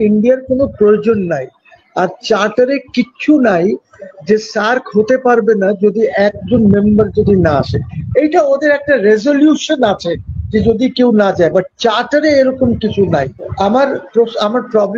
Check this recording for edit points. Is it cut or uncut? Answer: cut